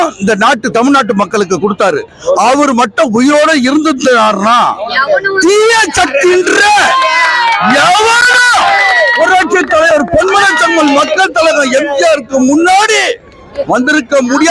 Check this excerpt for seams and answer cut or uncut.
uncut